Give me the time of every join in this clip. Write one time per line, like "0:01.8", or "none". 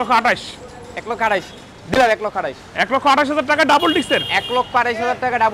none